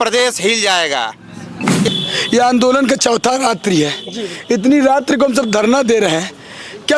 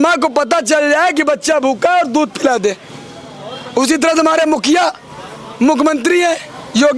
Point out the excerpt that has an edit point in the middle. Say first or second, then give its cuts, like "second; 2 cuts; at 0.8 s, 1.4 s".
first; 1 cut; at 1.9 s